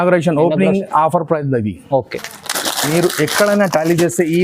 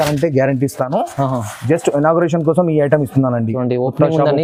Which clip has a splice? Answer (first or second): first